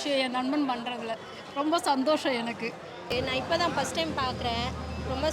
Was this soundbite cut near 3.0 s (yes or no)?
yes